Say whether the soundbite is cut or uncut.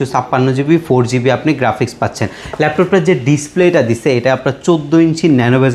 uncut